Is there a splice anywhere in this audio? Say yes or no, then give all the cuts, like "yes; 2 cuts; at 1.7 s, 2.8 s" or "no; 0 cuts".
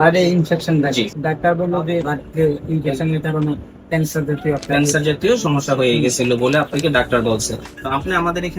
yes; 3 cuts; at 1.1 s, 2.1 s, 7.7 s